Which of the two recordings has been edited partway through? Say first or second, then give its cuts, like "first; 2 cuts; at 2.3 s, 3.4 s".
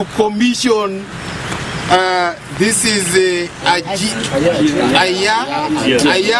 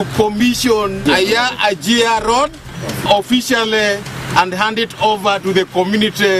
second; 2 cuts; at 1.0 s, 3.0 s